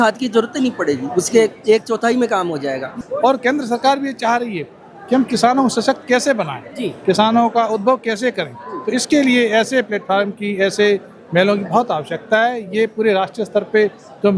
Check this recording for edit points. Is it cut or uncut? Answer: cut